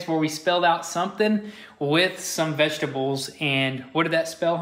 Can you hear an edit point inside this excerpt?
no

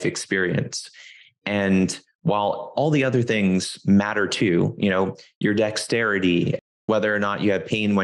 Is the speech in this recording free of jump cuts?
no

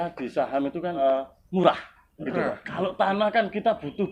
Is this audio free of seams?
no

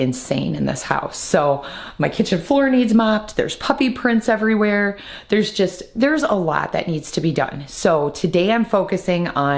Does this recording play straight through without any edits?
yes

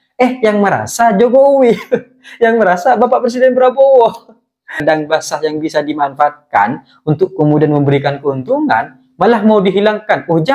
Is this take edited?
yes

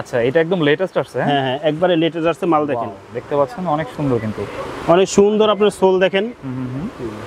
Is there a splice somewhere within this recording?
no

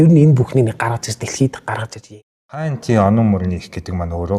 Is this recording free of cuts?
no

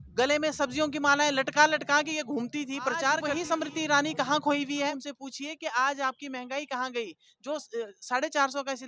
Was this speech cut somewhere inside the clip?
yes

